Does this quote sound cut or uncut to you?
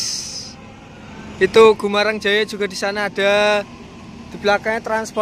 uncut